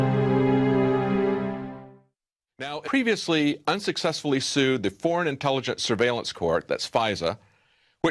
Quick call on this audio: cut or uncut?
uncut